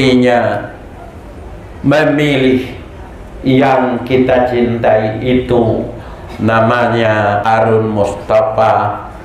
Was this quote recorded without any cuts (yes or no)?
no